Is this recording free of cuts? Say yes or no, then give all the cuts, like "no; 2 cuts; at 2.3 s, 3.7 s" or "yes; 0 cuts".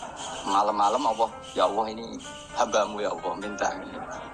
no; 1 cut; at 1.4 s